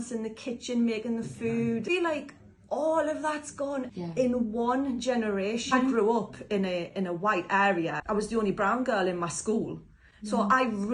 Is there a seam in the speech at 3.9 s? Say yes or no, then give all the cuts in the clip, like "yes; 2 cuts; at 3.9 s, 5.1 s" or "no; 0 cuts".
yes; 4 cuts; at 1.8 s, 3.9 s, 5.9 s, 8.0 s